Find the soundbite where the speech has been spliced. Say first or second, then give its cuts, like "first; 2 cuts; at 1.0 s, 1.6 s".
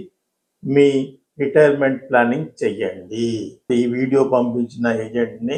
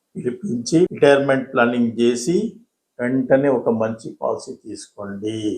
second; 1 cut; at 0.9 s